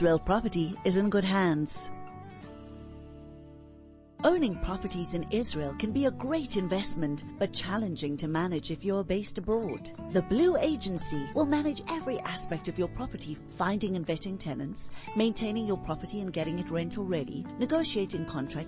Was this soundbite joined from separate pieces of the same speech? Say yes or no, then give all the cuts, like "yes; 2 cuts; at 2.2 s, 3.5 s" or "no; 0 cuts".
yes; 2 cuts; at 1.7 s, 4.1 s